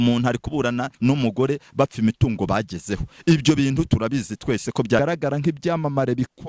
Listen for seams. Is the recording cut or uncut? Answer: cut